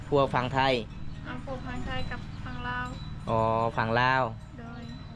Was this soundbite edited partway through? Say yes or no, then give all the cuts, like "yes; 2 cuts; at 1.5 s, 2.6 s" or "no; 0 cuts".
no; 0 cuts